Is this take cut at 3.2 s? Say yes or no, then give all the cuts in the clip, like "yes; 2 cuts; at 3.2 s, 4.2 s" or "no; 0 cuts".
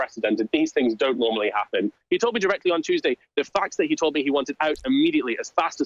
no; 1 cut; at 2.0 s